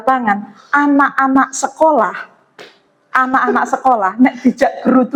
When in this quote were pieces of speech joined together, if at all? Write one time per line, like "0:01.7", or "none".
none